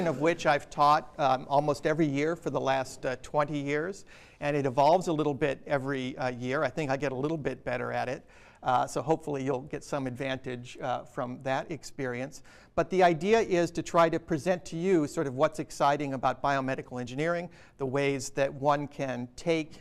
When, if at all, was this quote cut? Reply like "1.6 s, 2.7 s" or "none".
none